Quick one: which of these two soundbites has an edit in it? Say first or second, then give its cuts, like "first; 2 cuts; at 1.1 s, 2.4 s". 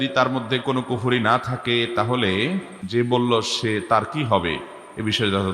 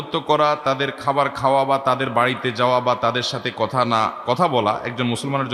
first; 1 cut; at 2.8 s